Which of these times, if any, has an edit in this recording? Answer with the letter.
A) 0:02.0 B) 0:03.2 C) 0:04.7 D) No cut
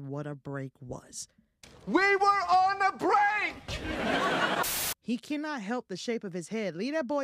C